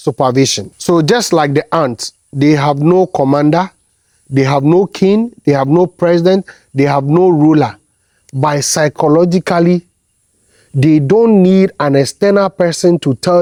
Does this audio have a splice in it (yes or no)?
no